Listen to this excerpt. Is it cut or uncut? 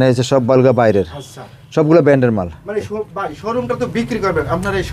uncut